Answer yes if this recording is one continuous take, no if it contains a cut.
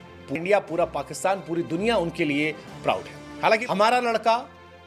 no